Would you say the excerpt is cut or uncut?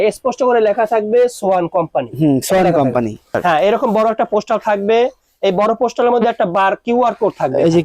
cut